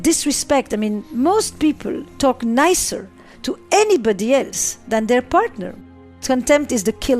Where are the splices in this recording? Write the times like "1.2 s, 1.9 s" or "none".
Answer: 5.7 s